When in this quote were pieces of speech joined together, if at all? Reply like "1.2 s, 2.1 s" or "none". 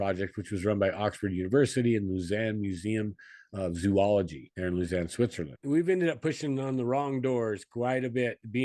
4.4 s, 5.5 s